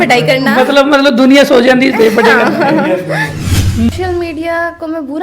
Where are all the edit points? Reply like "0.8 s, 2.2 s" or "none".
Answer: 3.9 s

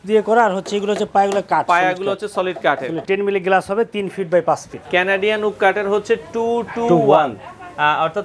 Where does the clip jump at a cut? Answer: 3.0 s, 4.7 s

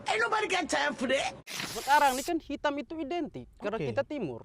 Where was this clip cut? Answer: 1.4 s

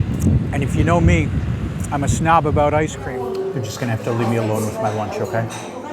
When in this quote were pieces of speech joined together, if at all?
3.0 s

